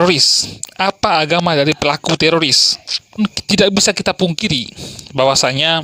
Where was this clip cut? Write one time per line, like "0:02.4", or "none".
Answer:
0:03.2